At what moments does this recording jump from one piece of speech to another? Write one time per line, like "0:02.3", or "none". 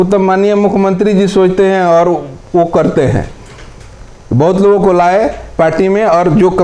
none